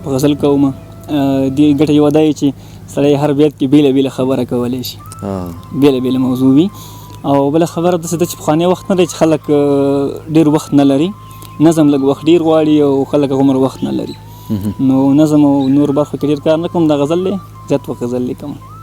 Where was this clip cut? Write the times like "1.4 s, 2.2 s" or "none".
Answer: none